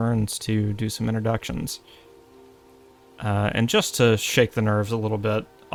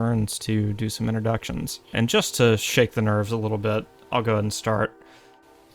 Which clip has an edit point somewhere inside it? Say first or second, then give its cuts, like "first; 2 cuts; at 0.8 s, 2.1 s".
second; 1 cut; at 1.9 s